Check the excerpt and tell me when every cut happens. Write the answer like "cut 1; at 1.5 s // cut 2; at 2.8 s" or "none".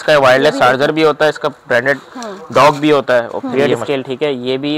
cut 1; at 3.4 s